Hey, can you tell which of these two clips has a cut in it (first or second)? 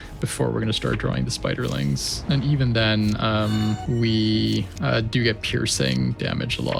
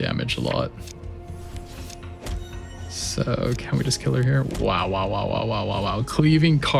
first